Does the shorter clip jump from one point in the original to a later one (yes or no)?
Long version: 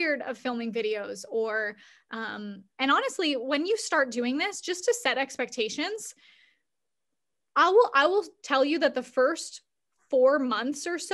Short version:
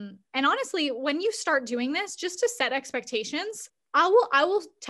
yes